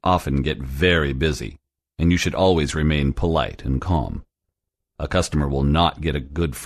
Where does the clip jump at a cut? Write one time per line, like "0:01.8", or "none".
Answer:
none